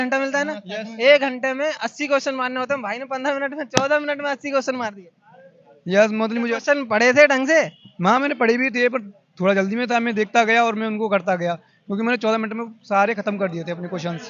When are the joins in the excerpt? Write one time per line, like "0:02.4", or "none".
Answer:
none